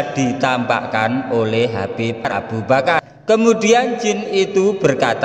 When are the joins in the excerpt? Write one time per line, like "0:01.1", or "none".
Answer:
0:03.0